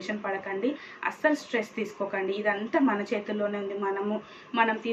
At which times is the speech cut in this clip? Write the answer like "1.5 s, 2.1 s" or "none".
none